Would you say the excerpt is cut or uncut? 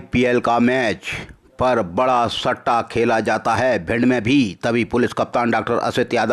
uncut